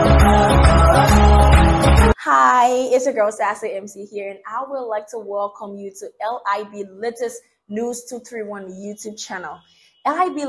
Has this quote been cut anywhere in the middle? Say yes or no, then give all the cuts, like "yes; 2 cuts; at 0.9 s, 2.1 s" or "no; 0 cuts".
yes; 1 cut; at 2.1 s